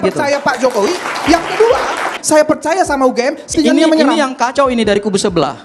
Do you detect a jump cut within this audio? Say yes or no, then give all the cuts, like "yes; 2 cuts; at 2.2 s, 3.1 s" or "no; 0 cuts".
yes; 2 cuts; at 2.2 s, 3.5 s